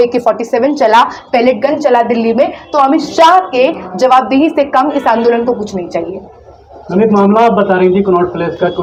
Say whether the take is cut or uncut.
uncut